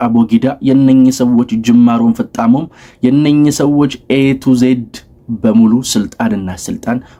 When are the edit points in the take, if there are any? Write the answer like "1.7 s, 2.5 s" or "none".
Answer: none